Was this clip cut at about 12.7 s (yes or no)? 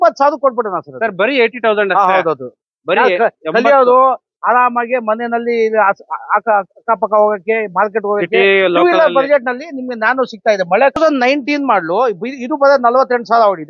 no